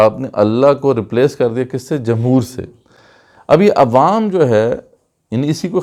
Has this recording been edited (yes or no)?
no